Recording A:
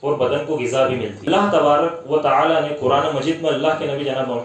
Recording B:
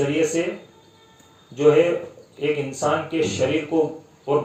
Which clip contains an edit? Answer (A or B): A